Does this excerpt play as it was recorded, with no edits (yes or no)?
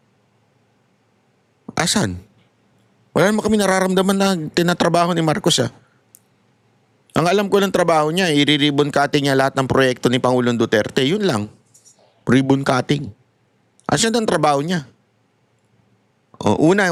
yes